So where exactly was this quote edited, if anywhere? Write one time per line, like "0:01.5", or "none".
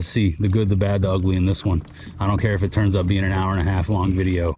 none